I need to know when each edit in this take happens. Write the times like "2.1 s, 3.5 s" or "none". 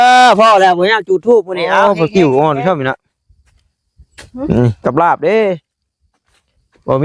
1.8 s